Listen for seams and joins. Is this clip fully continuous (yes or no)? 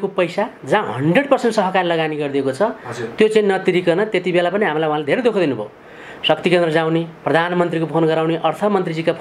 yes